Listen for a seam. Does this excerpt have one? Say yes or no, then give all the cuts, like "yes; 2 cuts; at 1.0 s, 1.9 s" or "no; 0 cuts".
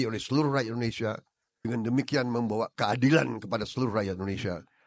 no; 0 cuts